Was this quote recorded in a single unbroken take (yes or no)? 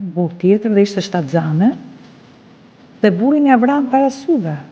yes